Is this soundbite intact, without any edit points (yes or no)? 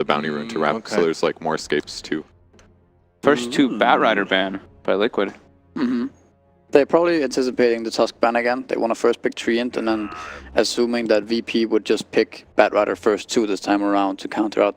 no